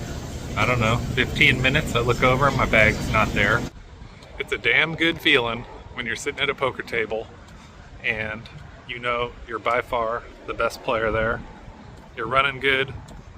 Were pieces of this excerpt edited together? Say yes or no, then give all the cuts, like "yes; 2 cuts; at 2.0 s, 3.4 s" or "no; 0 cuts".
yes; 1 cut; at 3.7 s